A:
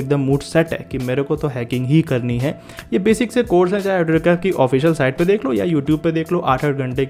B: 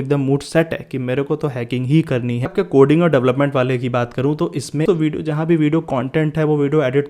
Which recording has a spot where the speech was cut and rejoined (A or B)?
B